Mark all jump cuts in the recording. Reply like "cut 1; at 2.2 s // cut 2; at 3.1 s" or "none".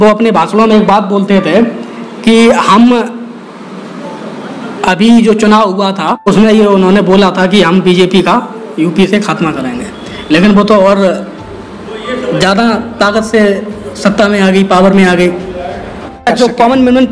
cut 1; at 6.2 s // cut 2; at 16.3 s

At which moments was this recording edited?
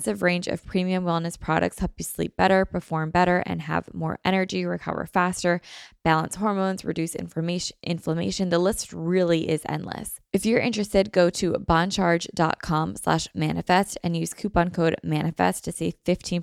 cut 1; at 10.1 s

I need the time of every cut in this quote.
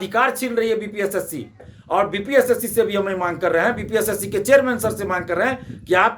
cut 1; at 1.7 s

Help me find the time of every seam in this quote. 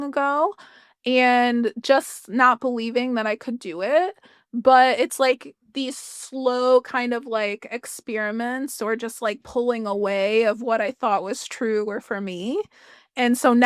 none

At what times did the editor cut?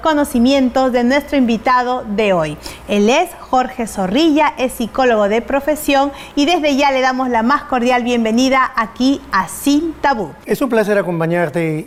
none

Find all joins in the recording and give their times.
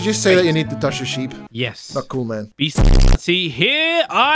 cut 1; at 1.4 s // cut 2; at 2.5 s

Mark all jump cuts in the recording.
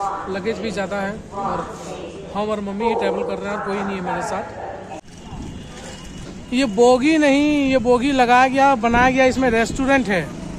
cut 1; at 5.0 s

